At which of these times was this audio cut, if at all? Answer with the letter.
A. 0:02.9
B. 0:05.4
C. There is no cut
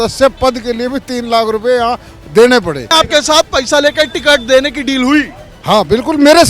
A